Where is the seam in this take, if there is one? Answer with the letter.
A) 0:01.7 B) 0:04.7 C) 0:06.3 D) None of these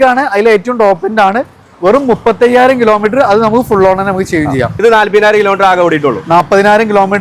B